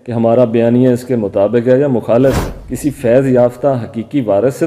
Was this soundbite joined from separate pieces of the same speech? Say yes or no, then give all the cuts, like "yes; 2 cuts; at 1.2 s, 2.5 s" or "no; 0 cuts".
yes; 1 cut; at 2.5 s